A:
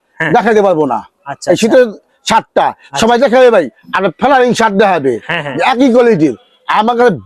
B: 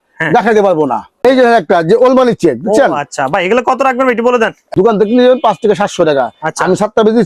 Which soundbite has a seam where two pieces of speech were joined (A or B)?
B